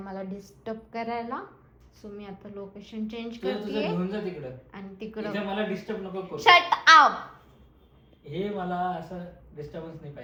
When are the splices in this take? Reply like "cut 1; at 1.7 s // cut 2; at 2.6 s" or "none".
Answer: none